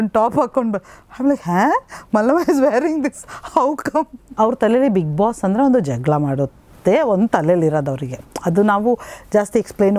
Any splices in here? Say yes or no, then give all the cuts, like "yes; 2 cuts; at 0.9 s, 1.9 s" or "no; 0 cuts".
yes; 1 cut; at 4.3 s